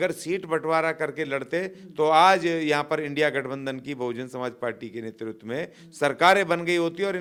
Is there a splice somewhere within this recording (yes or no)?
no